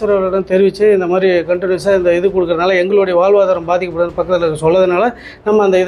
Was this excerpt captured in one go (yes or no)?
yes